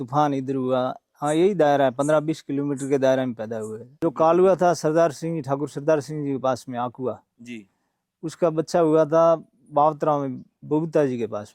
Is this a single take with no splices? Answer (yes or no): no